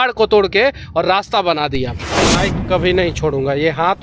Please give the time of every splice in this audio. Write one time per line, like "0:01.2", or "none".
0:02.2